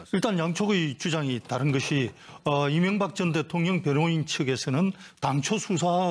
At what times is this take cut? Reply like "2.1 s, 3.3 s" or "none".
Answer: 2.1 s